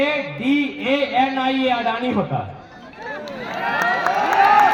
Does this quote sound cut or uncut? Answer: uncut